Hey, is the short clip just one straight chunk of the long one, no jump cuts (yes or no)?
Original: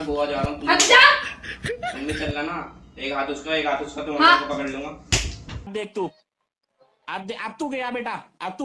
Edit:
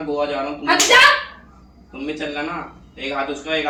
yes